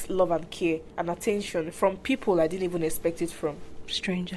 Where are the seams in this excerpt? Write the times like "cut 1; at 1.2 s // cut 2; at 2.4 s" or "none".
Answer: cut 1; at 0.9 s